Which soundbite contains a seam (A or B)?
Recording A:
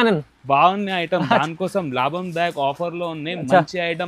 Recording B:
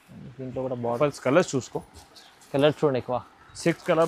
B